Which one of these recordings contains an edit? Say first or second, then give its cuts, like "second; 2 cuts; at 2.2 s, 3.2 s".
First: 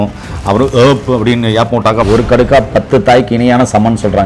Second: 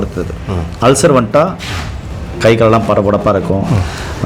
first; 1 cut; at 2.1 s